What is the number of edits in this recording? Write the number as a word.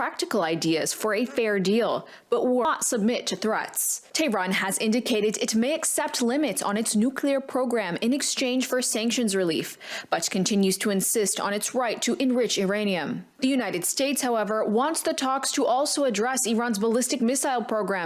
one